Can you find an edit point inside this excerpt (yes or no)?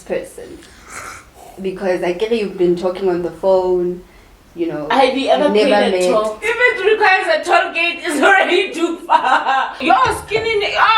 yes